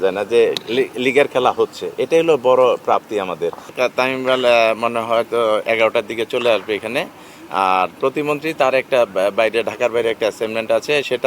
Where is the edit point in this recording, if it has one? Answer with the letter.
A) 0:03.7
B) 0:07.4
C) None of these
A